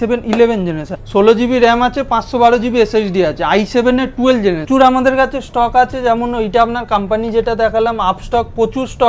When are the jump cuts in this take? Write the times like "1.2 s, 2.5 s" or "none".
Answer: 0.9 s, 4.7 s